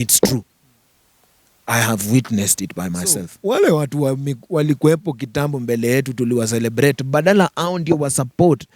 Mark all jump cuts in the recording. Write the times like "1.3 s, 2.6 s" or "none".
3.3 s